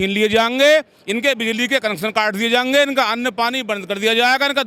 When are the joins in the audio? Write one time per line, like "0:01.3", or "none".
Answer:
none